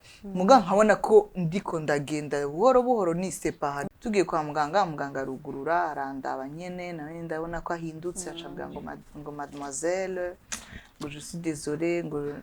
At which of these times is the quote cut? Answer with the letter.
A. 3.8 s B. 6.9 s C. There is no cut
A